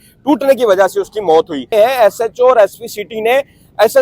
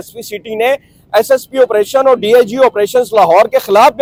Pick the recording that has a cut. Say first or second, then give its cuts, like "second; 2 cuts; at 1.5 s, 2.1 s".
first; 1 cut; at 1.7 s